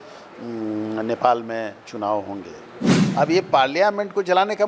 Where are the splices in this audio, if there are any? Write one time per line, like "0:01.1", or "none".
0:03.0